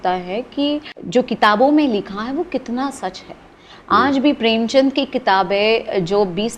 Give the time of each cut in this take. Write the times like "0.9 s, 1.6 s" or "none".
0.9 s